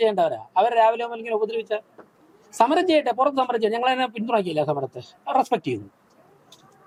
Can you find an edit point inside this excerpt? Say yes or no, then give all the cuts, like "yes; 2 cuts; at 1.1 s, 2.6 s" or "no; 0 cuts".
no; 0 cuts